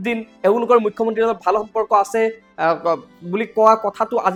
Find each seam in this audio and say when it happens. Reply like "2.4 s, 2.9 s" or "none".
none